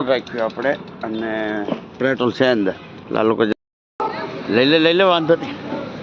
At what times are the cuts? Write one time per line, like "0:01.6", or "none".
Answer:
0:03.5